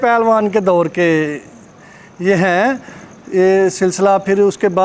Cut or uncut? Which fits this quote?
uncut